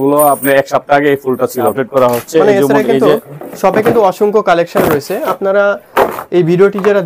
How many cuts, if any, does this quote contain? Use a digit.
1